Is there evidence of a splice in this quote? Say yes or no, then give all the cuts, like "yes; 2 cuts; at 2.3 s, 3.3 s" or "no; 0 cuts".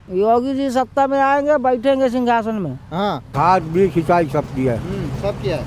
yes; 1 cut; at 3.2 s